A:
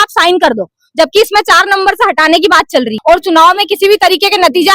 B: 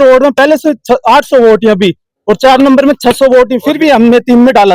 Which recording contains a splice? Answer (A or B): A